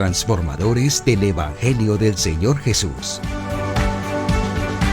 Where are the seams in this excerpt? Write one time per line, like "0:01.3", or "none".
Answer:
0:03.0